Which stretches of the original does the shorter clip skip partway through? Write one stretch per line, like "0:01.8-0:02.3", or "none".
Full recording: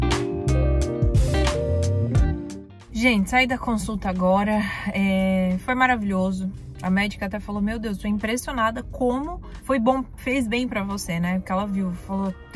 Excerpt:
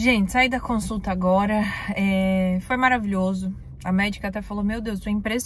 none